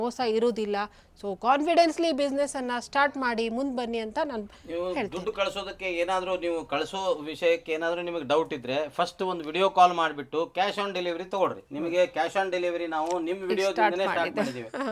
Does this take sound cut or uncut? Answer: uncut